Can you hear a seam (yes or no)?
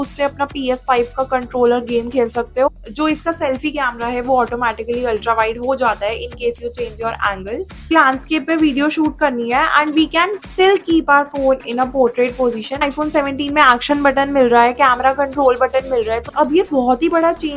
yes